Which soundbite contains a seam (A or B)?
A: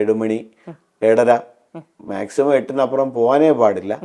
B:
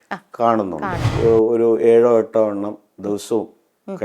B